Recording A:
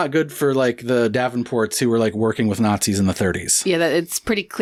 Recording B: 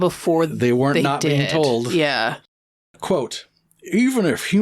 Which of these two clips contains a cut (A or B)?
B